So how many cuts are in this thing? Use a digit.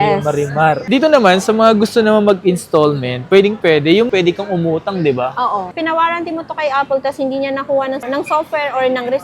2